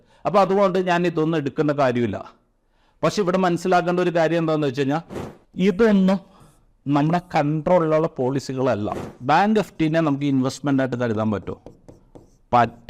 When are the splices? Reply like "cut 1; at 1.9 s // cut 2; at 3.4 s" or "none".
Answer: cut 1; at 9.1 s